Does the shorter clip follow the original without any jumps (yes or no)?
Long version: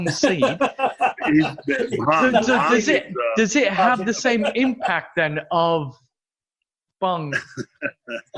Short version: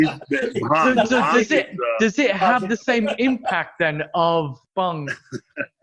no